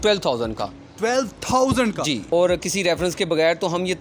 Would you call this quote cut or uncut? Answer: cut